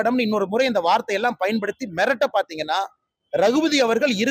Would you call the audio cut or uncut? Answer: uncut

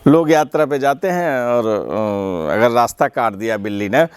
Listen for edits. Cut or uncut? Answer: uncut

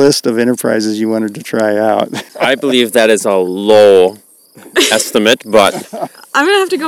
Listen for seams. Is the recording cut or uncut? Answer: cut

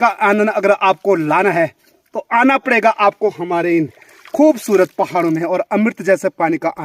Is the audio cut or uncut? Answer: uncut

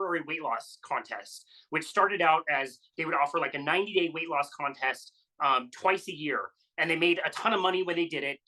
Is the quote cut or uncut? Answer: uncut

